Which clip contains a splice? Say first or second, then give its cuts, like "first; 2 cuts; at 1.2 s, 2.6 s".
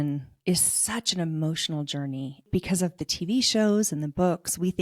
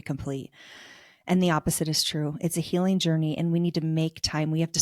first; 1 cut; at 2.5 s